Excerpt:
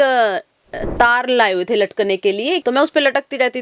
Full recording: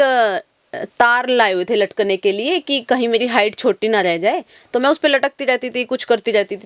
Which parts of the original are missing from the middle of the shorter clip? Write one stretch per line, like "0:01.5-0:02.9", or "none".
0:02.6-0:04.7